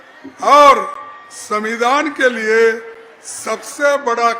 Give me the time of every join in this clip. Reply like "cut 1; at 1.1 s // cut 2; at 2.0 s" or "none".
none